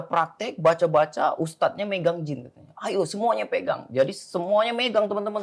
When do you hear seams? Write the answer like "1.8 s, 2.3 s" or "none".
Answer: none